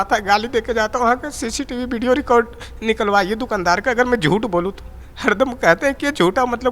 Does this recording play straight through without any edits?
yes; 0 cuts

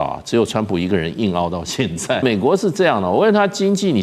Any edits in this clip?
yes; 1 cut; at 2.2 s

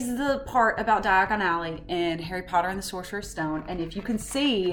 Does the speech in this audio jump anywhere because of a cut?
no; 0 cuts

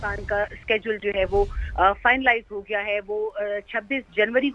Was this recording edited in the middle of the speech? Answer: no; 0 cuts

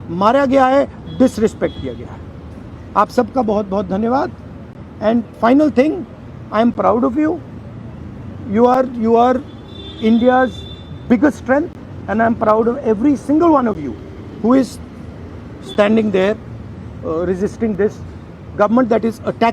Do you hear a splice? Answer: no; 0 cuts

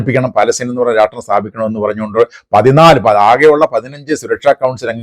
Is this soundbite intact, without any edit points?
yes; 0 cuts

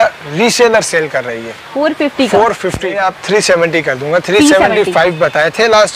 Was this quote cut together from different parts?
yes; 1 cut; at 3.0 s

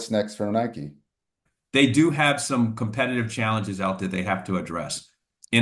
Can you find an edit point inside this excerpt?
yes; 1 cut; at 1.5 s

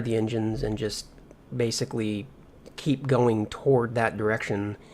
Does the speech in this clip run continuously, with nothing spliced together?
no; 1 cut; at 0.9 s

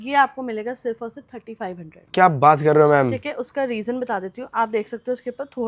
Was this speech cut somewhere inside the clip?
no; 0 cuts

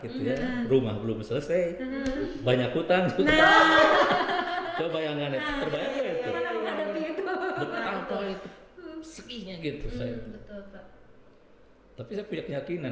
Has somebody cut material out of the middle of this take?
no; 0 cuts

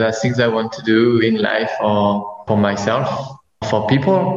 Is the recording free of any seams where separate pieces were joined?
no; 2 cuts; at 2.4 s, 3.6 s

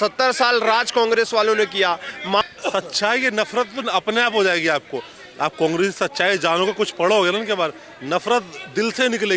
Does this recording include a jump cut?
yes; 1 cut; at 2.4 s

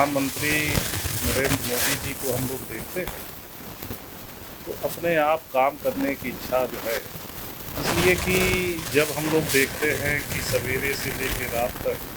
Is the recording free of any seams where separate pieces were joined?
yes; 0 cuts

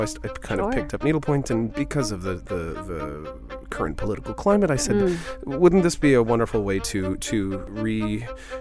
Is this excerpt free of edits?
no; 1 cut; at 7.7 s

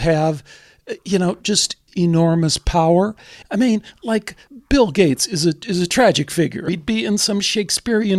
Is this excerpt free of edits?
no; 4 cuts; at 1.8 s, 3.4 s, 4.5 s, 6.7 s

